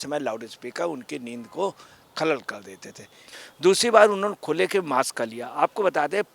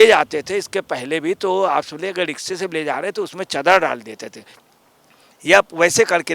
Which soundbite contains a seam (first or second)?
first